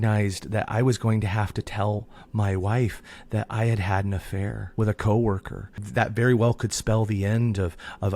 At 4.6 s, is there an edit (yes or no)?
yes